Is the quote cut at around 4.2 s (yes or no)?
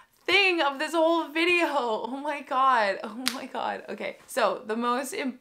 yes